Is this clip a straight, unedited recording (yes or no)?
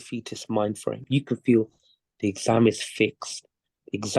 no